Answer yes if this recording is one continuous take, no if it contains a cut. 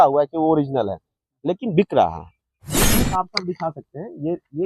no